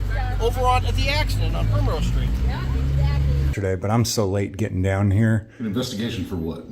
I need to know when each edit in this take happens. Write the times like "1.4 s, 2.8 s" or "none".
3.5 s